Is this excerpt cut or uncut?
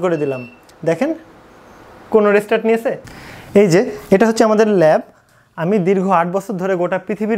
cut